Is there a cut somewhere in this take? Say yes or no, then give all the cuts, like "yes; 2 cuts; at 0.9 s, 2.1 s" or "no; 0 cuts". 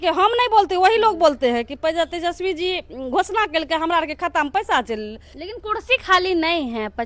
yes; 1 cut; at 5.3 s